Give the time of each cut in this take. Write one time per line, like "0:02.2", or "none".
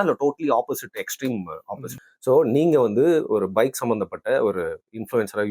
0:01.9